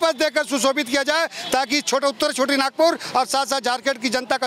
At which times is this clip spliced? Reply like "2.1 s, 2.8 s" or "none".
none